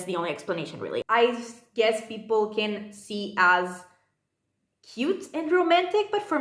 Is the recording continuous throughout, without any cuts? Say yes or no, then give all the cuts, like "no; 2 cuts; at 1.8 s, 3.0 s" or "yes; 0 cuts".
no; 1 cut; at 1.0 s